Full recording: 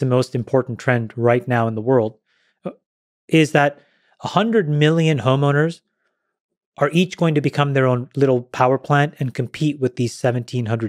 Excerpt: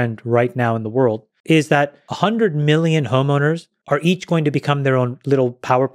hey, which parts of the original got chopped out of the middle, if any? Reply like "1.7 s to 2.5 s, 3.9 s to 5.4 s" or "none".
2.2 s to 3.1 s, 3.9 s to 4.2 s, 5.9 s to 6.6 s